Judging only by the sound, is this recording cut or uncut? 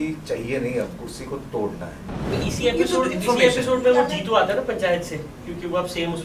cut